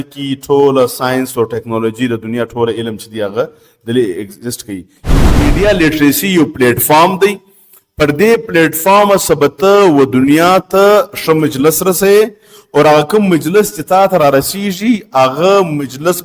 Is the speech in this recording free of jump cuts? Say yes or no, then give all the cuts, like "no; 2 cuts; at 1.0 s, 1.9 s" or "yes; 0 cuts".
no; 1 cut; at 5.3 s